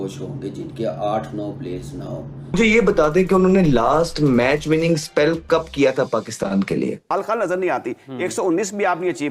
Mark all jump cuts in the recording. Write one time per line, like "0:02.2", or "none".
0:02.5
0:07.1